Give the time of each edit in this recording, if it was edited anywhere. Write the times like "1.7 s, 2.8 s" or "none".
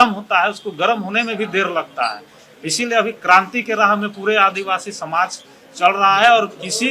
none

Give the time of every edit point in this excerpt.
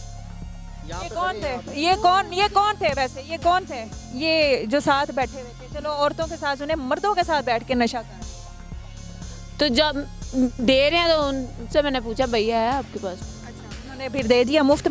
8.2 s, 9.5 s

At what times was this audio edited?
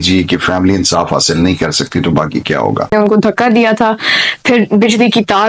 2.9 s

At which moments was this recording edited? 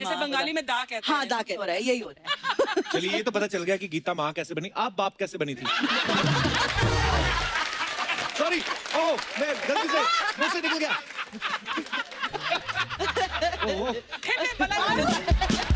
none

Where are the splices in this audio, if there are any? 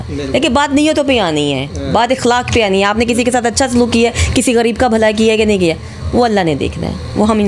none

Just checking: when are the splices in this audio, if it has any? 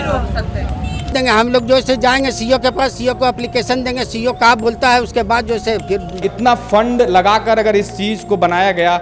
1.1 s, 6.3 s

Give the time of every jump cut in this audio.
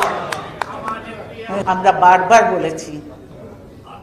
1.5 s

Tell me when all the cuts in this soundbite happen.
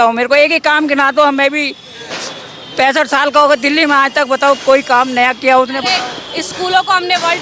none

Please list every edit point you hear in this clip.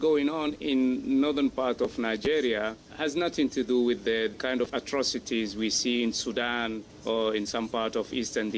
2.8 s, 4.4 s, 6.9 s

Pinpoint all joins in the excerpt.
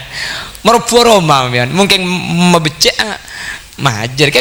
none

